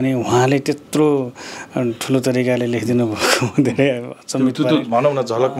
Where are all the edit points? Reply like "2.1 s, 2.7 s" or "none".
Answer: none